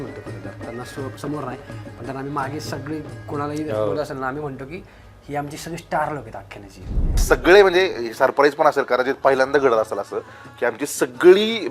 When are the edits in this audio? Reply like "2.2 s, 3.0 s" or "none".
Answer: 7.2 s